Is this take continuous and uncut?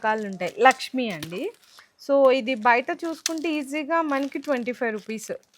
yes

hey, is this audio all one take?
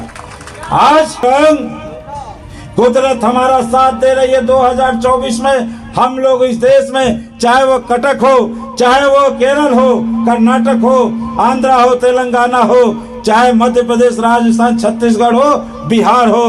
no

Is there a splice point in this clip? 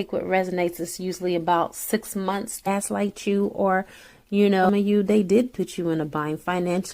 yes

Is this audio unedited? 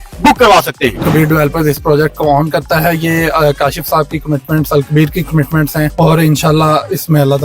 no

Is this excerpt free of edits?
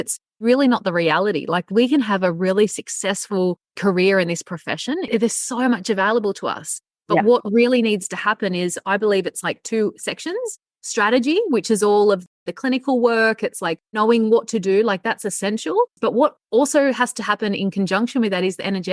no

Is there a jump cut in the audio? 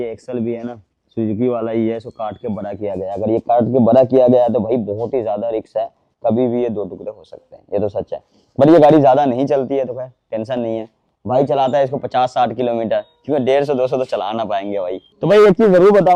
no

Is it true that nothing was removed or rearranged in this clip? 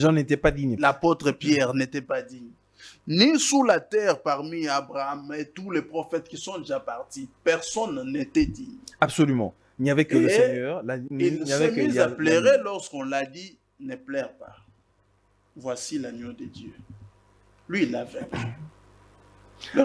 yes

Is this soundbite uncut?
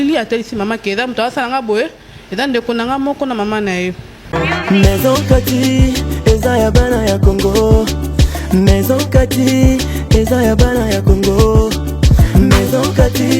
no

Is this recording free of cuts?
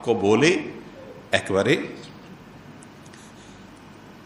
no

